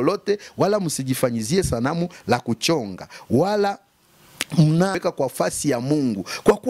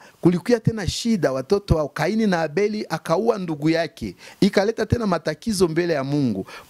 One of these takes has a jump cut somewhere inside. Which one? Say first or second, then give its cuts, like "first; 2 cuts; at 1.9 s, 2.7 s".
first; 1 cut; at 5.0 s